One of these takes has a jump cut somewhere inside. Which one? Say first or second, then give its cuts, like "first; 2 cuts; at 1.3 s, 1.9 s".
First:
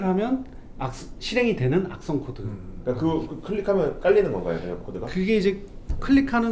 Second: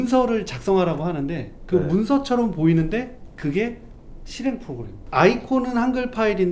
second; 1 cut; at 4.9 s